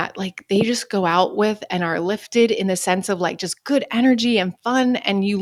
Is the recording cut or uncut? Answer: uncut